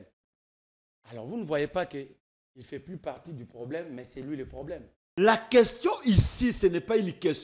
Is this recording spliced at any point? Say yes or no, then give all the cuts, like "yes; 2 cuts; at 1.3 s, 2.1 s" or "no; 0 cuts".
yes; 1 cut; at 5.0 s